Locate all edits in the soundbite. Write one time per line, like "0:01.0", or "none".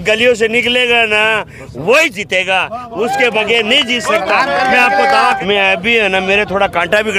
0:05.4